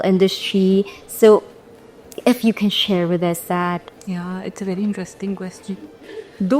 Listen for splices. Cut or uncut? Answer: uncut